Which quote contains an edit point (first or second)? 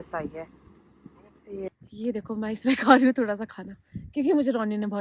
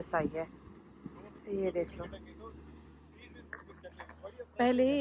first